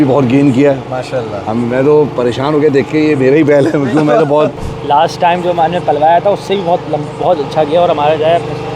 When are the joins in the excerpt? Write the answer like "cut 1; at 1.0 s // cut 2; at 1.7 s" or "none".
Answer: cut 1; at 4.7 s

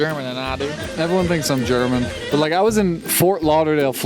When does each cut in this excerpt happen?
cut 1; at 2.2 s

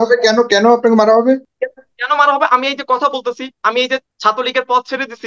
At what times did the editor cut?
cut 1; at 1.5 s // cut 2; at 4.1 s

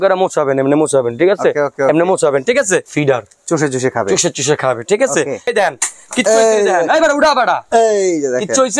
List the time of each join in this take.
cut 1; at 2.9 s // cut 2; at 5.5 s

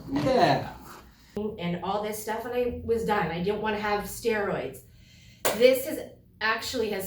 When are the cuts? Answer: cut 1; at 1.4 s

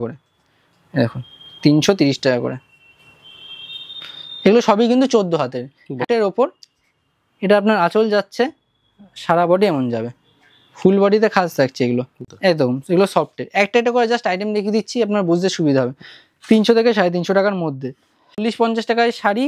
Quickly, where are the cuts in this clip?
cut 1; at 6.0 s // cut 2; at 12.1 s // cut 3; at 18.4 s

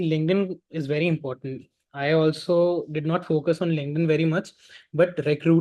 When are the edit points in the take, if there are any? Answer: none

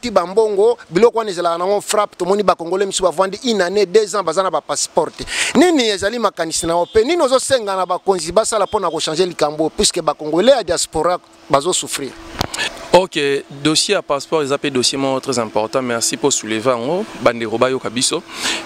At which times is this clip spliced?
cut 1; at 12.7 s

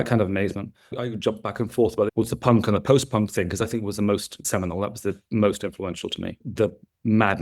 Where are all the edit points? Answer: cut 1; at 0.9 s // cut 2; at 2.1 s // cut 3; at 6.4 s

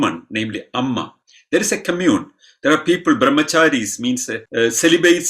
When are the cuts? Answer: cut 1; at 4.4 s

